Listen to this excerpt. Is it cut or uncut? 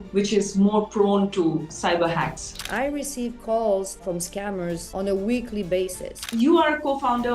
cut